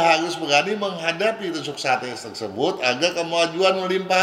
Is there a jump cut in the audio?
no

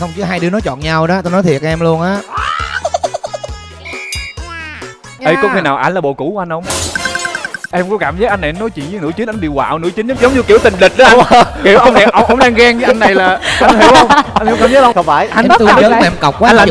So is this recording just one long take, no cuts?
no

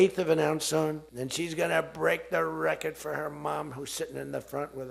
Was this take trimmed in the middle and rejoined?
yes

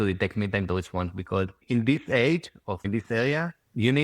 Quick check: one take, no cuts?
no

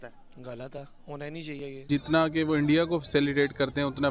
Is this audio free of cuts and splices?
no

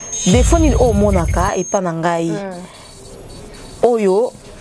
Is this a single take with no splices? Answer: yes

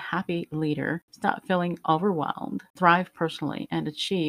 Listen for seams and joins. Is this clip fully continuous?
no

